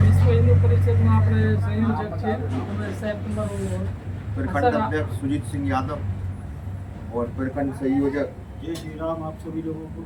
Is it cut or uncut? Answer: uncut